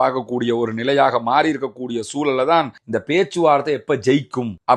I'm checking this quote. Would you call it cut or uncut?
cut